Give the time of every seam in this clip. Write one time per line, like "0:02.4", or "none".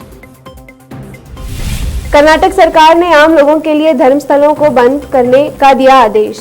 0:01.3